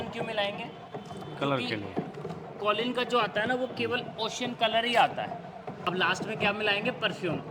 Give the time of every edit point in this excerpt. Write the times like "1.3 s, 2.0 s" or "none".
5.8 s